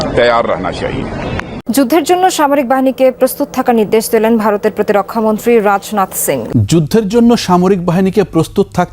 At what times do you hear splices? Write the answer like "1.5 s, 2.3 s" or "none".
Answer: 1.5 s, 6.4 s